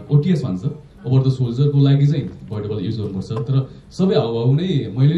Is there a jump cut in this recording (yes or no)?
no